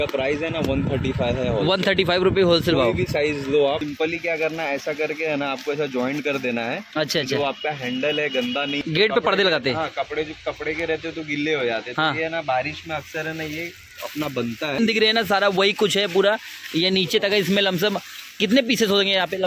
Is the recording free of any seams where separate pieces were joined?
no; 3 cuts; at 3.9 s, 8.8 s, 14.8 s

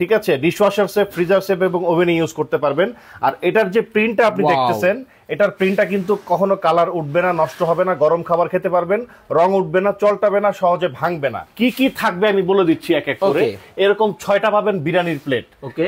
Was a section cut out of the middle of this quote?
yes; 1 cut; at 11.4 s

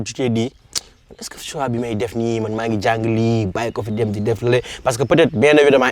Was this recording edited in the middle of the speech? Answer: no; 0 cuts

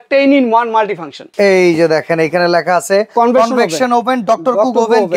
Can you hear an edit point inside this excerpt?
yes; 1 cut; at 1.2 s

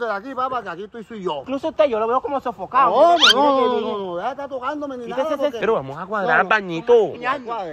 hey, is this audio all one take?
no; 2 cuts; at 1.4 s, 5.6 s

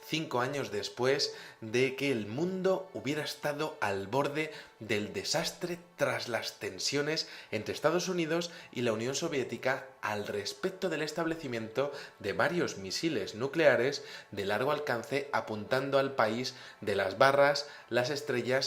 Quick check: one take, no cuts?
no; 1 cut; at 6.2 s

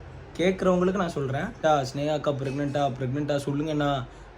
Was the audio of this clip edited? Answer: yes; 1 cut; at 1.6 s

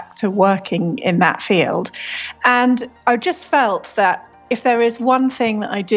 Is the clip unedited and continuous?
no; 1 cut; at 2.9 s

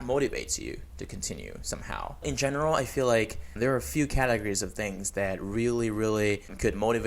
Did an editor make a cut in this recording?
yes; 2 cuts; at 2.2 s, 3.5 s

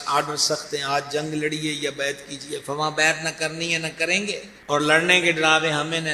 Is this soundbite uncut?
no; 1 cut; at 4.5 s

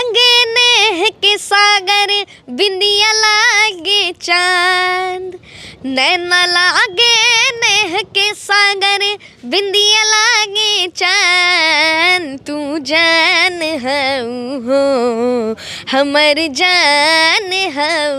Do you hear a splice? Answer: no; 0 cuts

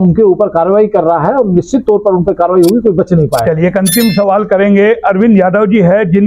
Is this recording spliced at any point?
no; 0 cuts

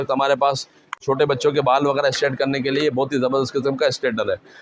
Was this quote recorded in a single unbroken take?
no; 1 cut; at 1.0 s

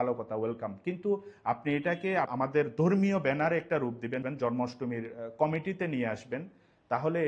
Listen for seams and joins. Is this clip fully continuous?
no; 2 cuts; at 2.3 s, 4.2 s

